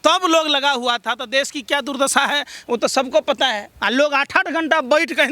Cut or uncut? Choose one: cut